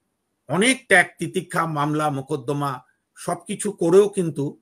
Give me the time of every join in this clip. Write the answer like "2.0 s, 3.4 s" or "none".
none

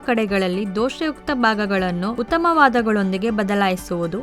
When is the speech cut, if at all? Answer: 2.2 s

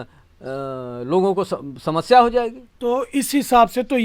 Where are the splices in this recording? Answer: none

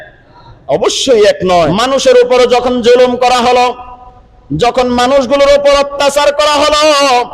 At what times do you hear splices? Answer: 1.7 s

